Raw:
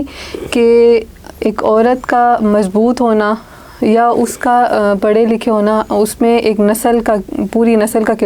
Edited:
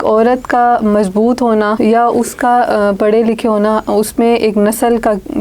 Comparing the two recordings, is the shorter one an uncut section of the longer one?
no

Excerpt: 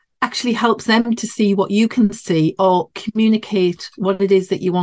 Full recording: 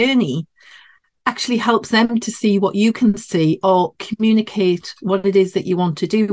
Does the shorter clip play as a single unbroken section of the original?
yes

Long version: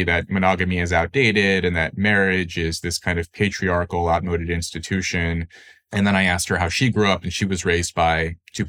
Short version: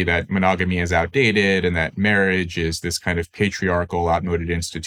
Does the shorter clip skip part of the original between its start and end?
no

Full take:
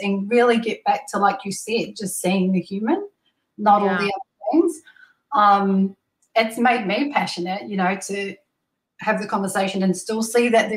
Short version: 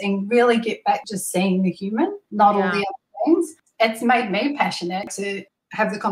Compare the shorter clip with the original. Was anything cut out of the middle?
yes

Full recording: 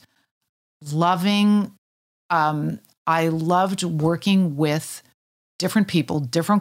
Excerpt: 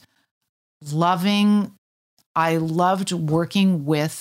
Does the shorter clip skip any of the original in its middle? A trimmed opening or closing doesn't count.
yes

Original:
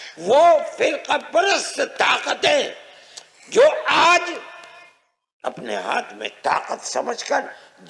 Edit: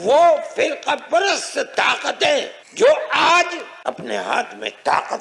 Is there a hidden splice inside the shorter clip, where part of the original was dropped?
yes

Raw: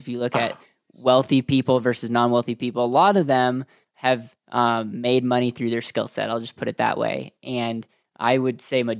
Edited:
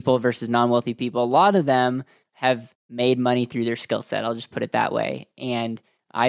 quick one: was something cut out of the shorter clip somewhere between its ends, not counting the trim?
yes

